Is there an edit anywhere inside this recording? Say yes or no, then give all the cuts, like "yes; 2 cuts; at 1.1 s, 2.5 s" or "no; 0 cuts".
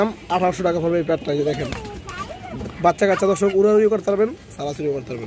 no; 0 cuts